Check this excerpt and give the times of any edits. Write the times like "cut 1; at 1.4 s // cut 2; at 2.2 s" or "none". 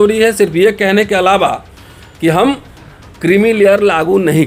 none